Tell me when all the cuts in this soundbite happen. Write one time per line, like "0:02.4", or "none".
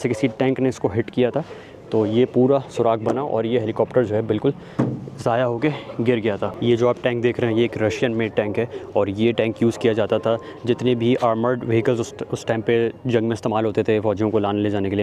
0:06.5